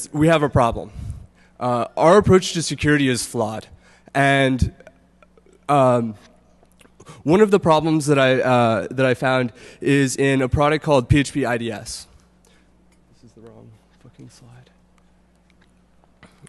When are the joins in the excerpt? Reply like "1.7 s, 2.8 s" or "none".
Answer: none